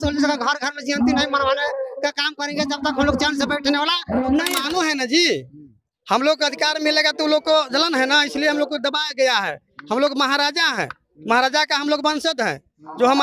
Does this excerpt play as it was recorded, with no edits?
no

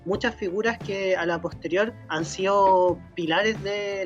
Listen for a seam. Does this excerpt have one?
yes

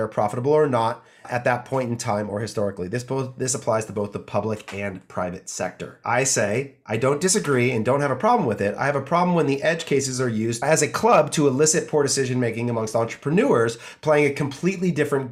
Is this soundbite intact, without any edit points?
no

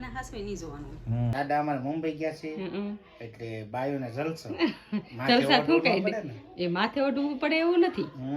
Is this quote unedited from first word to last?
no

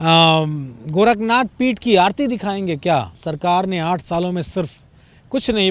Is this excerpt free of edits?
no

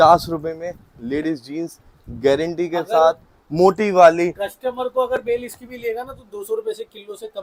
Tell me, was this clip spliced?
no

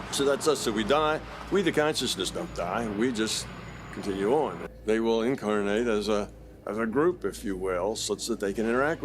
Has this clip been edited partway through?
yes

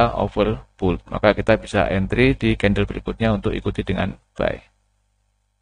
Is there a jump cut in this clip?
no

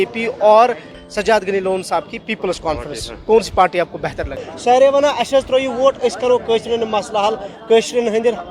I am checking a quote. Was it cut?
yes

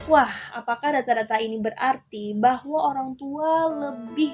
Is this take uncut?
yes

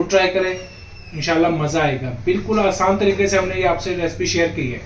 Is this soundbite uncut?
yes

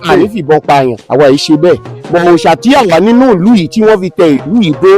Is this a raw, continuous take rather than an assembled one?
no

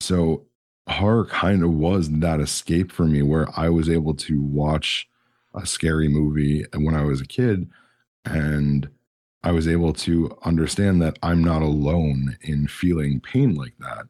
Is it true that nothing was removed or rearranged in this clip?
yes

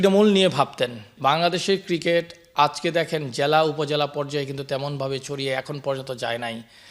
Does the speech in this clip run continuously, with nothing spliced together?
no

